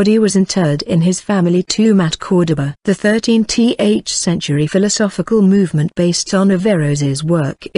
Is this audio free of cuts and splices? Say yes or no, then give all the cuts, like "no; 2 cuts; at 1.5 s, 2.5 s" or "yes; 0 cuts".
no; 1 cut; at 3.8 s